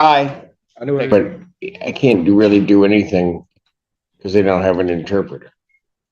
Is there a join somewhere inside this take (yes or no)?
yes